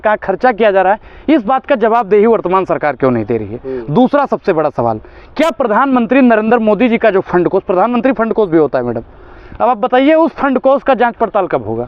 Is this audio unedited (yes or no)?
yes